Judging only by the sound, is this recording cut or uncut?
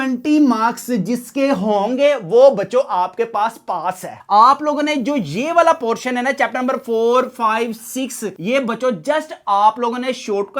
cut